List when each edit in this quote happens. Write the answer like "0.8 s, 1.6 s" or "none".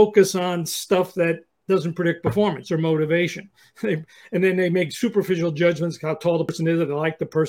6.5 s